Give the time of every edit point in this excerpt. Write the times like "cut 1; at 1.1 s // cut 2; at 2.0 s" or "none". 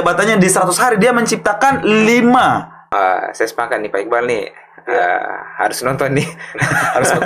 cut 1; at 2.8 s